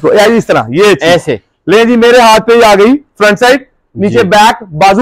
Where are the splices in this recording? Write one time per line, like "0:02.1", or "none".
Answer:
none